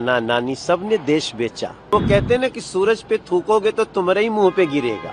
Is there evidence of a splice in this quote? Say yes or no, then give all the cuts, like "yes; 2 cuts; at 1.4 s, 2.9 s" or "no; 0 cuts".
yes; 1 cut; at 1.9 s